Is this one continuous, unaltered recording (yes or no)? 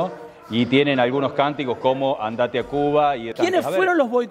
no